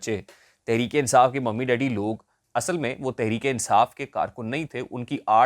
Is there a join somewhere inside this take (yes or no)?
yes